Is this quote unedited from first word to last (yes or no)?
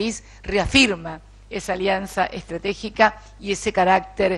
yes